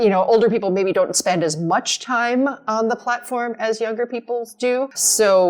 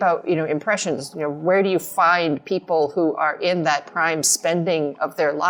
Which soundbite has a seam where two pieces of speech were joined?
first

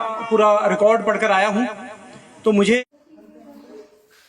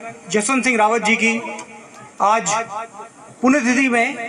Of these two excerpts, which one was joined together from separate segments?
first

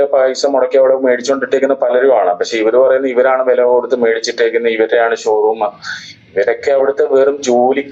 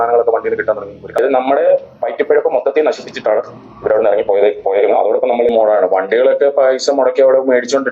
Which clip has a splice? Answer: second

